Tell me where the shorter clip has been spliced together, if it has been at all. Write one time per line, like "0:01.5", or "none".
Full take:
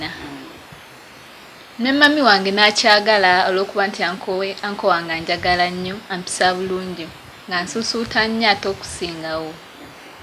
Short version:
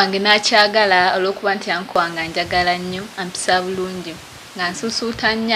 0:02.0